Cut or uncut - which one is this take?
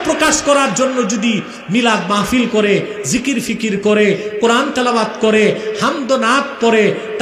uncut